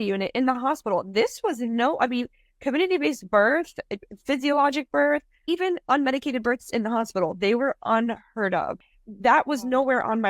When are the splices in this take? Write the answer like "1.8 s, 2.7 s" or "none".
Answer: 8.8 s